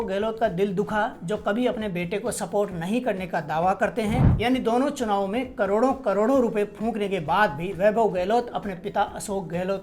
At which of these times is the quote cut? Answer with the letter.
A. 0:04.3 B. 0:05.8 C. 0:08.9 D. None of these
A